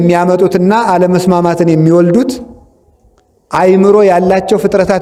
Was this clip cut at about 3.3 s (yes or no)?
no